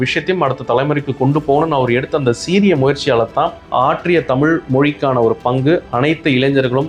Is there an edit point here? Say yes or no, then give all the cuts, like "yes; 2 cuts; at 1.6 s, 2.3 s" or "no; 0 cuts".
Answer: yes; 1 cut; at 3.6 s